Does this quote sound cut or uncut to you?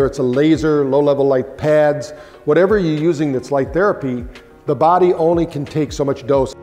uncut